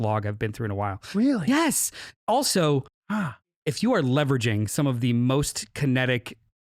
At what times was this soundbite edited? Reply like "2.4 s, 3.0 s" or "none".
3.6 s